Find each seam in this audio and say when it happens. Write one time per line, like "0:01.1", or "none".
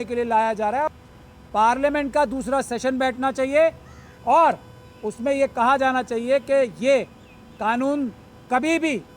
0:00.9